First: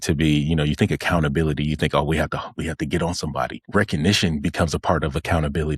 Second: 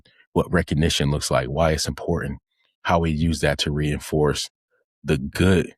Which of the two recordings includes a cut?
first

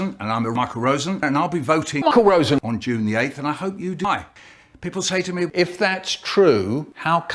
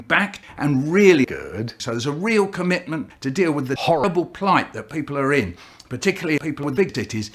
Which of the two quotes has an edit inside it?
first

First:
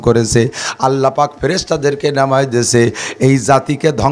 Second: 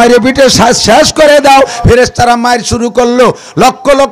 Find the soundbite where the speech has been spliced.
second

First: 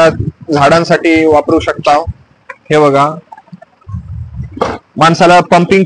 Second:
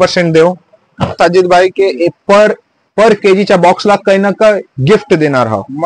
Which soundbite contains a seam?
second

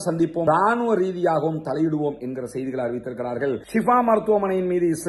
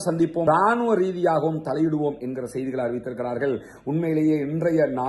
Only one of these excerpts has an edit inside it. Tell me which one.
first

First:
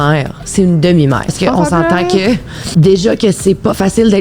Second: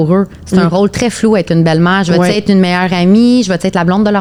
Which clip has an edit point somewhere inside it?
first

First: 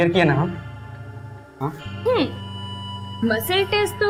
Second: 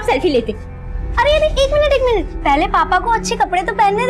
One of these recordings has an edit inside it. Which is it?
second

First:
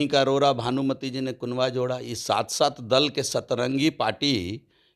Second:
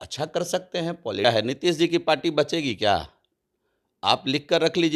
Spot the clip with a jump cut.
second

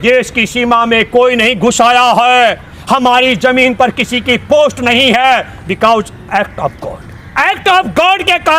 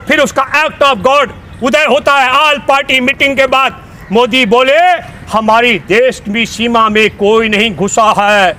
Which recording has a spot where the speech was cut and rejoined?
first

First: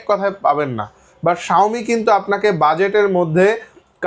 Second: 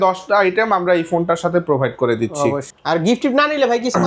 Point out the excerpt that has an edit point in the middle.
second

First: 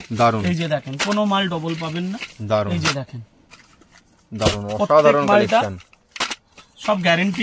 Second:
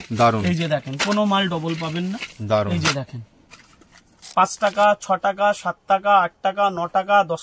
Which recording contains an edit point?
second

